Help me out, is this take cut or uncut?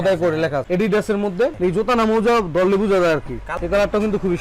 cut